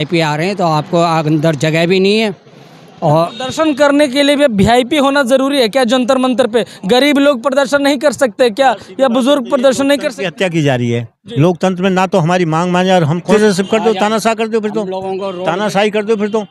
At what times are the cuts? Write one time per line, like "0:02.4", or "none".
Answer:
0:13.2